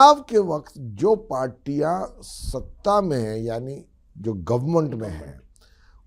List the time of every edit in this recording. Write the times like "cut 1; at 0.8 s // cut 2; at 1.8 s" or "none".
none